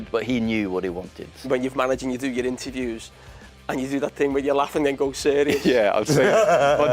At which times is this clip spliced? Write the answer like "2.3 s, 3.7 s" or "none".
1.5 s